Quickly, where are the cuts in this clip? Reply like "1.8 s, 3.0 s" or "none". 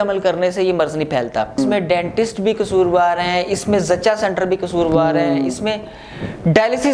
1.6 s